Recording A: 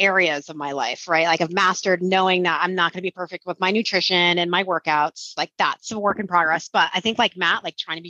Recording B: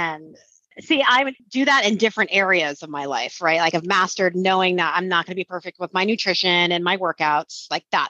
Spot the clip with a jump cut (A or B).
B